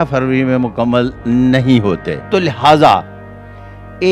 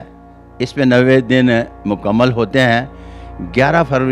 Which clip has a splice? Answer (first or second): first